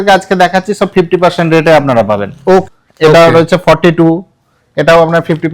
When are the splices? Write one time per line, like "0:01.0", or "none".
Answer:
0:02.7